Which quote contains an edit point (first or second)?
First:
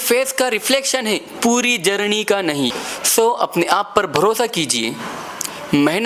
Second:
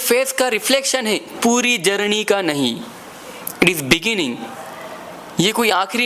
second